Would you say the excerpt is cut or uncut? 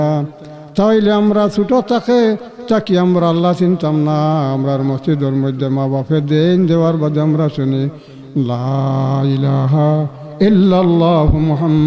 uncut